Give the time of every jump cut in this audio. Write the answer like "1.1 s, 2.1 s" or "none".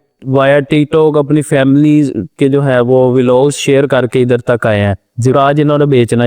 none